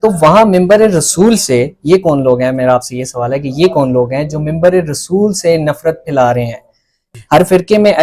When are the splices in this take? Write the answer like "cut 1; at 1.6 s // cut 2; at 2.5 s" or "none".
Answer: cut 1; at 7.0 s

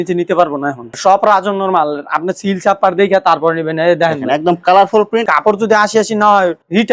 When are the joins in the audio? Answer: cut 1; at 0.9 s // cut 2; at 5.2 s

